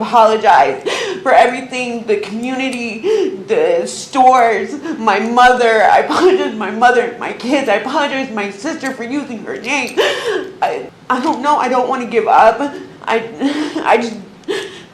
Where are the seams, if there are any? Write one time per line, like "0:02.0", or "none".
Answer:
0:10.9